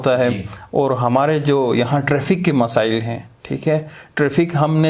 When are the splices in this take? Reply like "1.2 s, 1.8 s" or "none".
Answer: none